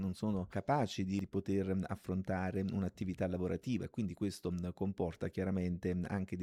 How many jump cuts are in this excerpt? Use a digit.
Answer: 0